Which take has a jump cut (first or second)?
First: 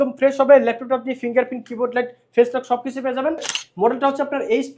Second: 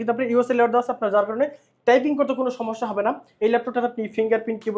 first